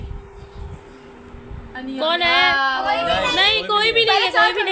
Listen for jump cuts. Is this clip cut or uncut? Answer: uncut